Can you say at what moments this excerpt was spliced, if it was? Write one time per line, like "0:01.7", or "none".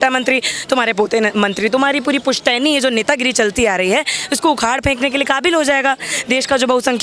none